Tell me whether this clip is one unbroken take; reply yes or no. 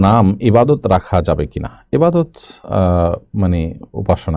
yes